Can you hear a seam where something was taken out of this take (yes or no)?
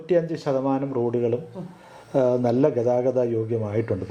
no